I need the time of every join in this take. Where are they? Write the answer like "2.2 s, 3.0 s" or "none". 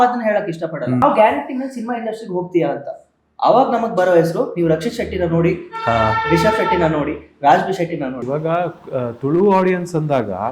1.0 s, 8.4 s